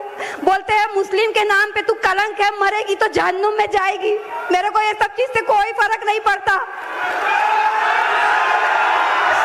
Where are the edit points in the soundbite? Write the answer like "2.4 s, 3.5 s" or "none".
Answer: 3.7 s